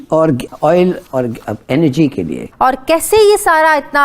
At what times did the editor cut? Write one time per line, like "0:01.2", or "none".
0:02.5

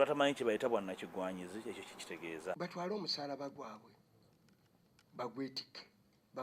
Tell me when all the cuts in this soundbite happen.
0:02.6

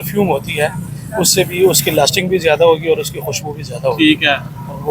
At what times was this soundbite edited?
none

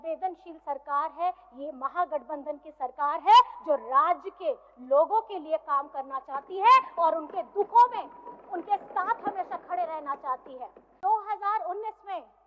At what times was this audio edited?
0:11.0

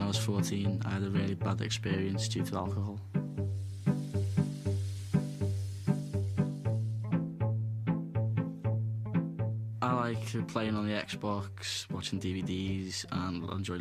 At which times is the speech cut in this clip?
0:07.4

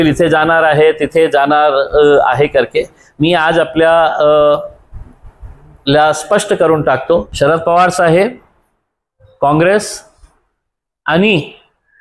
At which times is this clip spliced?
0:07.3

